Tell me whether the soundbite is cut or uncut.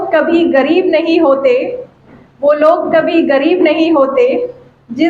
uncut